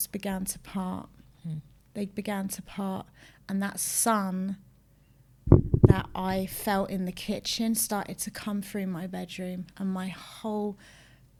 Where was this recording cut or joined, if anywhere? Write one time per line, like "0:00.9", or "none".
none